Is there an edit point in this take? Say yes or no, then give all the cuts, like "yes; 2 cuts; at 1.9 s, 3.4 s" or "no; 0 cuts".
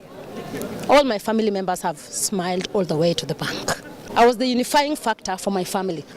yes; 1 cut; at 3.9 s